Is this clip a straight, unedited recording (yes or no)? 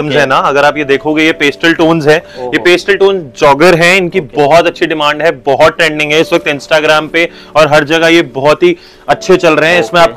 yes